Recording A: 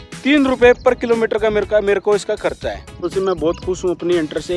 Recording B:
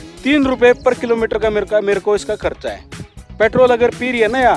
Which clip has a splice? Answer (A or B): A